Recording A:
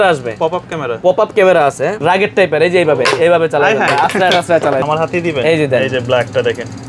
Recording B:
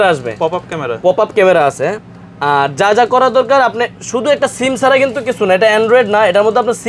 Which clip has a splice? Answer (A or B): A